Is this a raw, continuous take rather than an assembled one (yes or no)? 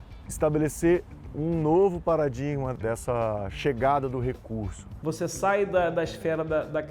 no